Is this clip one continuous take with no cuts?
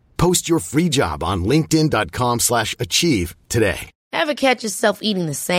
no; 1 cut; at 3.9 s

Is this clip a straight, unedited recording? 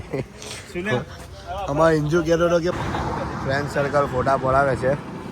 no; 1 cut; at 2.7 s

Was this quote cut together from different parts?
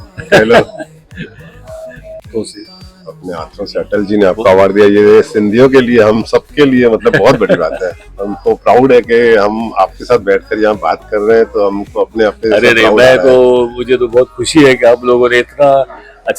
yes; 1 cut; at 2.3 s

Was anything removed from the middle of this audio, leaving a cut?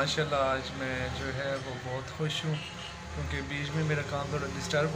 no; 0 cuts

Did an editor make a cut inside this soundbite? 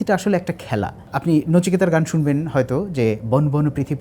no; 0 cuts

